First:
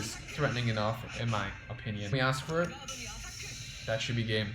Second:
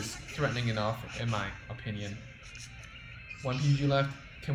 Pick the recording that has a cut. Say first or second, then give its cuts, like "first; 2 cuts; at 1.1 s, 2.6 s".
first; 1 cut; at 2.1 s